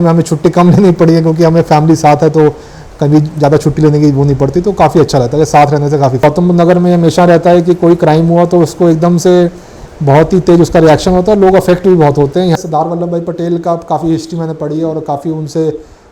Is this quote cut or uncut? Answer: cut